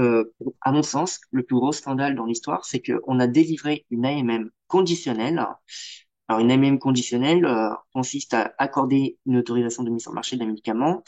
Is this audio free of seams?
yes; 0 cuts

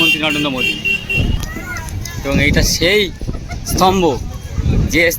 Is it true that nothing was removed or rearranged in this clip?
no; 1 cut; at 1.3 s

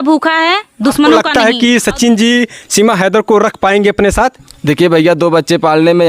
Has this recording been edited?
yes; 1 cut; at 1.2 s

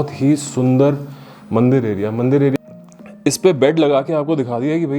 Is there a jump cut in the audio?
yes; 1 cut; at 2.5 s

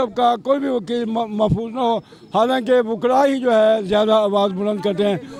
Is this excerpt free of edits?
yes; 0 cuts

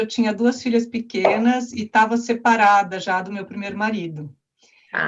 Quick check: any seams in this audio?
no; 0 cuts

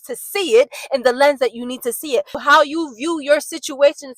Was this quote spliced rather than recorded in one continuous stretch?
yes; 1 cut; at 2.3 s

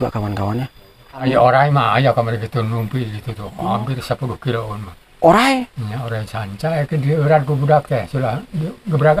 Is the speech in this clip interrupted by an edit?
yes; 1 cut; at 1.2 s

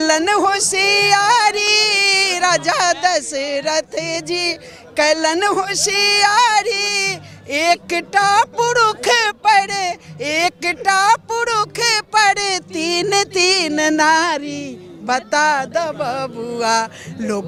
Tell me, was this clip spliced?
no; 0 cuts

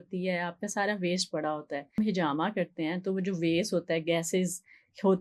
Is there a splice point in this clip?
yes; 1 cut; at 2.0 s

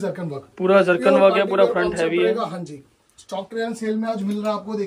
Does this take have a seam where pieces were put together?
no; 0 cuts

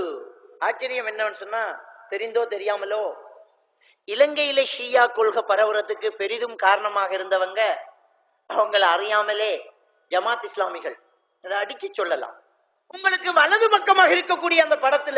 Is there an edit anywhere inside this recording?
yes; 1 cut; at 13.0 s

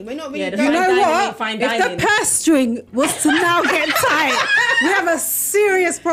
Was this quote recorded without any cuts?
yes; 0 cuts

